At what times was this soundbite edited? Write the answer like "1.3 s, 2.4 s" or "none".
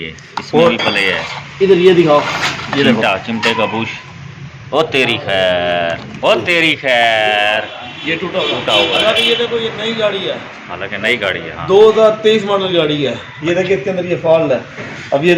none